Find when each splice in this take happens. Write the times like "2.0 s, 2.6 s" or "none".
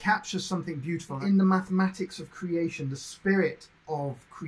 1.2 s